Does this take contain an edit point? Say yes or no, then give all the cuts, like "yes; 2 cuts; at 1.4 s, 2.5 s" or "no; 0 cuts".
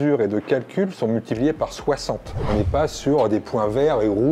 yes; 1 cut; at 2.4 s